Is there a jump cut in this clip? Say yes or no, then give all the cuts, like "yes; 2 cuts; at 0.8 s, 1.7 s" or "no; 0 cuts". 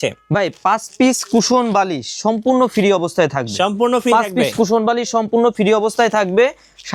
no; 0 cuts